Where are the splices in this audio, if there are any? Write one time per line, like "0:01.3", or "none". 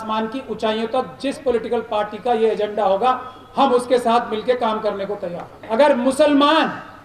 0:05.6